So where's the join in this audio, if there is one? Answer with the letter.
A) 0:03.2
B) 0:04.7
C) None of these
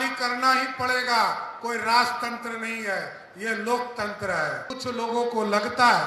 B